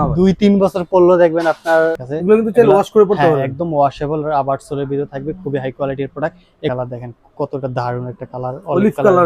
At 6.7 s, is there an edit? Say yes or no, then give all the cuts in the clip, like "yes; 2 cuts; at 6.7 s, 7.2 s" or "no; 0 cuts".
yes; 2 cuts; at 2.1 s, 6.7 s